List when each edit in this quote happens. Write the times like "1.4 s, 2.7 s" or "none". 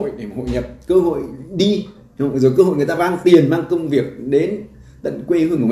none

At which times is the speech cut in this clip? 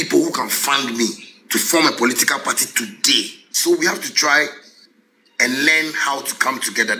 3.4 s

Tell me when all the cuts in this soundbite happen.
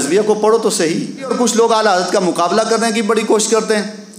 1.3 s

